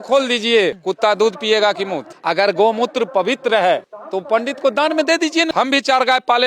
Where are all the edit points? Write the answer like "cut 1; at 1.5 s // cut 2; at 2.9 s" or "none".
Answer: cut 1; at 2.1 s // cut 2; at 5.5 s